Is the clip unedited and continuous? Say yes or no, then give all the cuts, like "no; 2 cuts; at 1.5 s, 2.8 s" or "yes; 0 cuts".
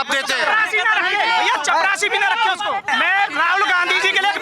no; 1 cut; at 2.9 s